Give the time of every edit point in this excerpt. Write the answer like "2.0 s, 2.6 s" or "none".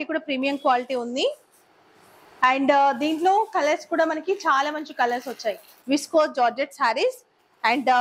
5.7 s